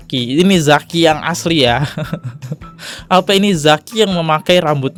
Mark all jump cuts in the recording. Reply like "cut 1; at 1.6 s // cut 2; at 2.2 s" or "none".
none